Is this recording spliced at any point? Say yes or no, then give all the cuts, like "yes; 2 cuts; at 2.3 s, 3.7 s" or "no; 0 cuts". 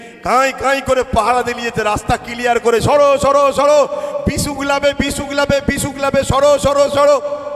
no; 0 cuts